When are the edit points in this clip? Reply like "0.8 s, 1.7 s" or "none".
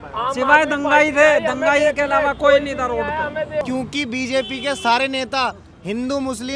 3.6 s